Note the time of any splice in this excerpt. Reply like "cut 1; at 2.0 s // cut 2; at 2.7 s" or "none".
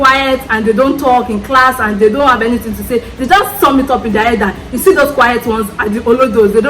none